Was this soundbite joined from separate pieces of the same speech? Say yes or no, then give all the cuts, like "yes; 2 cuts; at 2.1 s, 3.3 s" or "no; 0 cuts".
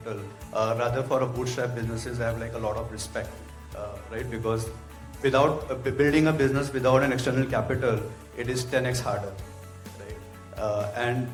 no; 0 cuts